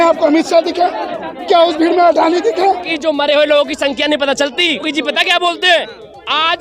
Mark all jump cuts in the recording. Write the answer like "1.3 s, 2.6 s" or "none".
2.9 s, 4.9 s